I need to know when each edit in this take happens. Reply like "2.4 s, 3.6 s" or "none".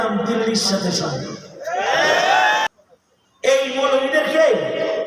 2.7 s